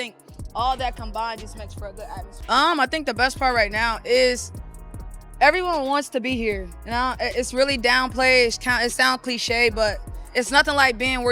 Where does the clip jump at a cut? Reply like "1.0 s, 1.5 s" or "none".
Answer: 2.3 s